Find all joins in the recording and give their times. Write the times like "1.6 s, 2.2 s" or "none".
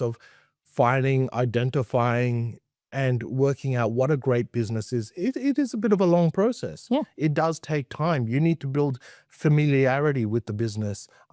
none

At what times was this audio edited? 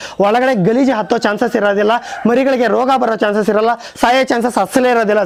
none

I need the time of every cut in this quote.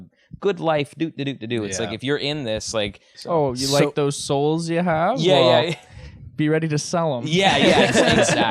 3.1 s

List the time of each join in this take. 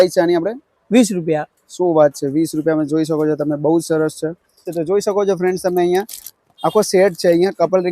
4.7 s

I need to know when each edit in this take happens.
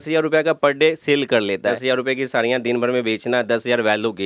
1.8 s

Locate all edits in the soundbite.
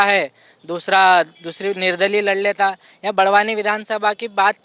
none

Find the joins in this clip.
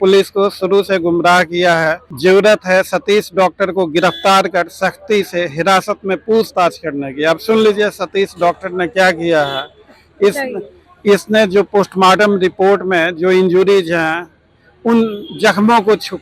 2.0 s

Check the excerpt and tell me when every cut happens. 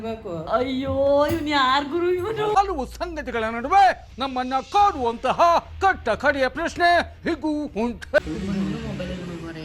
8.2 s

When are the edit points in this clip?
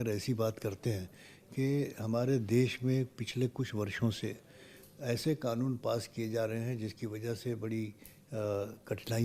none

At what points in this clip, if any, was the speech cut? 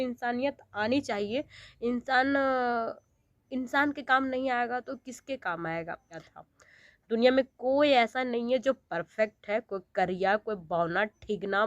6.3 s

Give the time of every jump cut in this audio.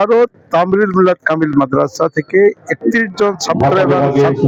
none

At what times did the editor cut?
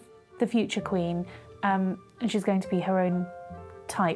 none

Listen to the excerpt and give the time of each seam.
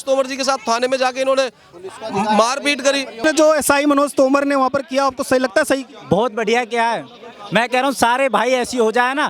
3.2 s

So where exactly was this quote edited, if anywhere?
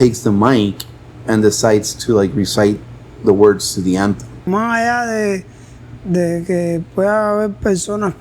4.5 s

